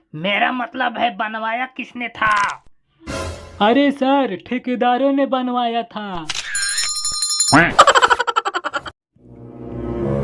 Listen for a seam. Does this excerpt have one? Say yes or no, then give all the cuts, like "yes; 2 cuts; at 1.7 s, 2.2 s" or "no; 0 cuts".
yes; 1 cut; at 9.0 s